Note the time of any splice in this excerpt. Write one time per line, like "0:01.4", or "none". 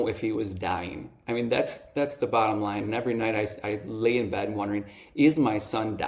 none

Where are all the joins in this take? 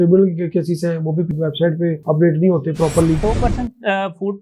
0:03.2

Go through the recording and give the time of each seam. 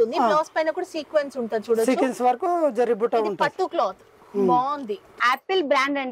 0:05.1

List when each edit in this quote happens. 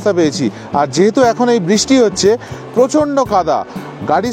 none

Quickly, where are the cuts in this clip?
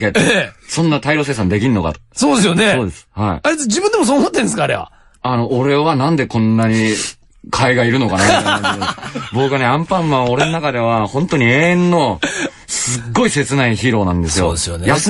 0:12.6

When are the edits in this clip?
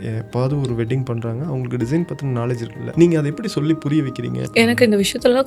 0:02.8
0:04.4

